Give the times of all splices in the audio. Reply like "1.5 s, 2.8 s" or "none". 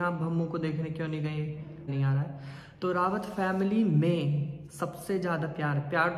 1.9 s